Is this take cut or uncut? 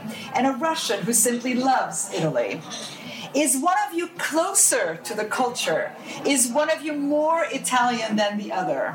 uncut